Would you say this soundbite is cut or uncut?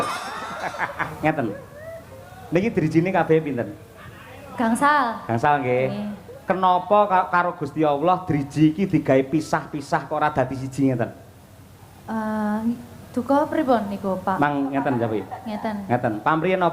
cut